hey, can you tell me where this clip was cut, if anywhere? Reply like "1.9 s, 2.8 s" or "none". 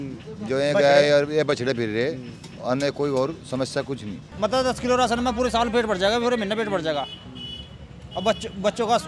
4.2 s